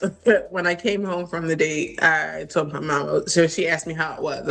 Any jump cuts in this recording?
no; 0 cuts

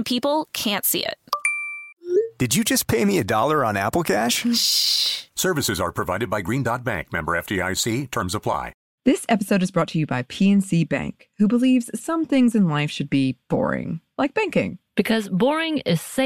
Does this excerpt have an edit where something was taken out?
yes; 1 cut; at 8.8 s

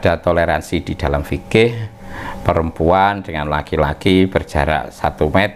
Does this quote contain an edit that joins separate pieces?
no; 0 cuts

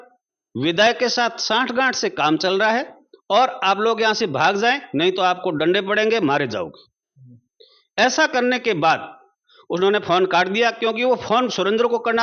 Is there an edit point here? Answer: no; 0 cuts

